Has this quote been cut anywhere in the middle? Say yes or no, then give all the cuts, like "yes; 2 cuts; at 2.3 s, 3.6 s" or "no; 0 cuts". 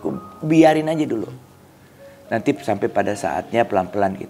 no; 0 cuts